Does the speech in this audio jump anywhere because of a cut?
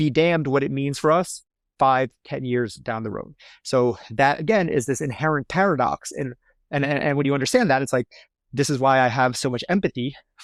no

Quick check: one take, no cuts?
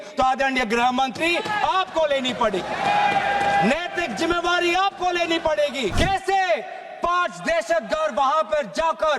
no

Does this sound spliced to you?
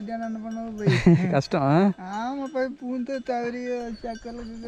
no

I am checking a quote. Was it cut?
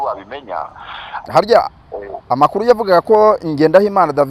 yes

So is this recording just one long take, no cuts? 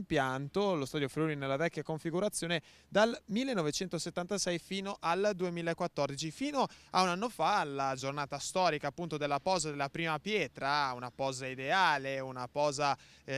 no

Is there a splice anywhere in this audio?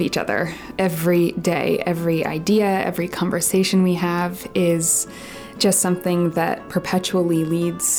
no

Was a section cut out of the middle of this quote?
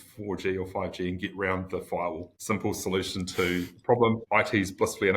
yes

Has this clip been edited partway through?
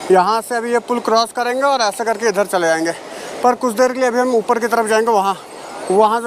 no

